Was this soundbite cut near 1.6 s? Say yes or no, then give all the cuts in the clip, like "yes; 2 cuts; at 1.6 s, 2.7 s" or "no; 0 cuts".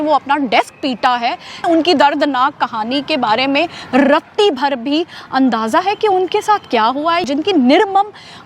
yes; 2 cuts; at 1.6 s, 7.2 s